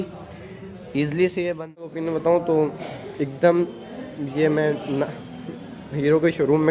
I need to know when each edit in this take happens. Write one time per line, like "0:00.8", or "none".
0:01.9